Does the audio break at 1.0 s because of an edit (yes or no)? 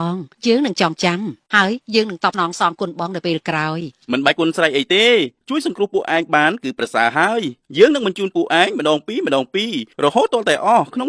no